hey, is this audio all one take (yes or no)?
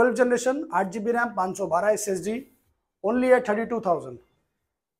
yes